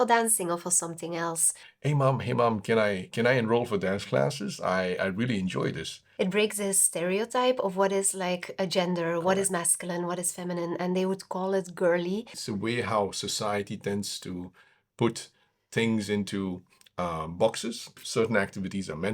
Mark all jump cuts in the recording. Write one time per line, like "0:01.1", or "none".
0:01.6
0:06.0
0:12.4
0:18.0